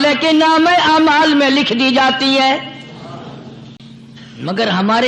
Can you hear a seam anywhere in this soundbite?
yes; 1 cut; at 3.8 s

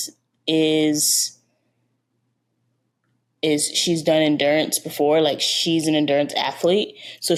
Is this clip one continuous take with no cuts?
yes; 0 cuts

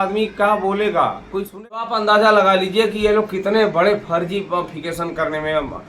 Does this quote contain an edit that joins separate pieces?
yes; 1 cut; at 1.8 s

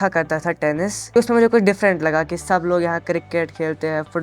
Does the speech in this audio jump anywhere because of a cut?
yes; 1 cut; at 1.1 s

